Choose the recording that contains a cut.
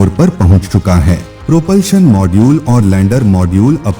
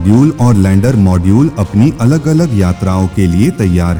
first; 1 cut; at 1.3 s

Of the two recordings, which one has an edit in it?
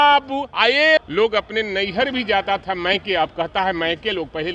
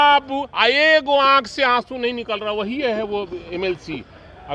first; 1 cut; at 1.0 s

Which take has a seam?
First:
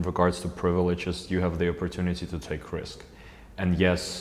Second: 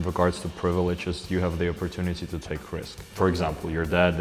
second; 1 cut; at 3.0 s

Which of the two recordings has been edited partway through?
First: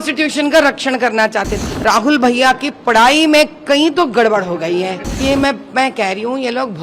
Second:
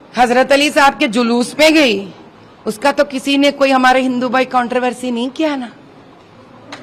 first; 2 cuts; at 1.5 s, 5.1 s

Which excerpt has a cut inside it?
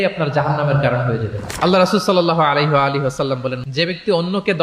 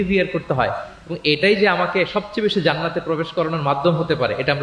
first; 1 cut; at 3.6 s

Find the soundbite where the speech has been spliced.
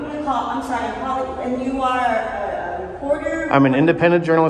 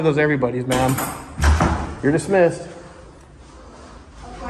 second; 1 cut; at 1.8 s

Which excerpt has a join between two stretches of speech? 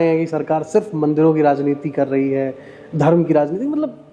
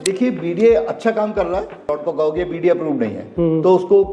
second; 1 cut; at 1.8 s

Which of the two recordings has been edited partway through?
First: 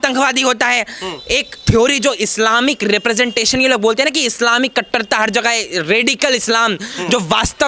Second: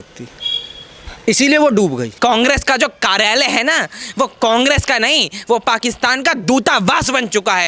second; 1 cut; at 2.1 s

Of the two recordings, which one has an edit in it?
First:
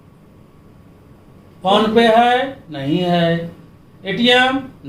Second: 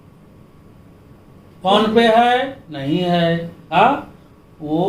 second; 1 cut; at 3.7 s

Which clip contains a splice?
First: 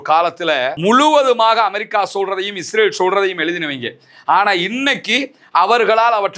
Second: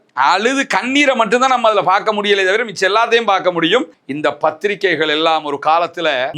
second; 1 cut; at 4.0 s

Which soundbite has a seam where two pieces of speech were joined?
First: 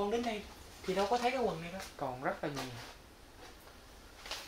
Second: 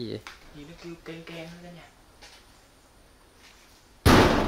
first; 1 cut; at 1.9 s

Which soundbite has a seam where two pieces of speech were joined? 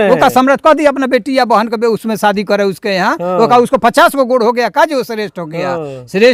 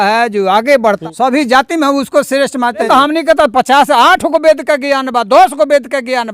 second; 2 cuts; at 1.0 s, 2.9 s

